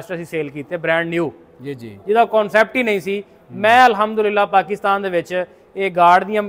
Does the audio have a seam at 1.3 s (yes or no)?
no